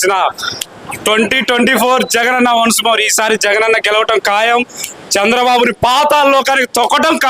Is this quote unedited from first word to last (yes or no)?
yes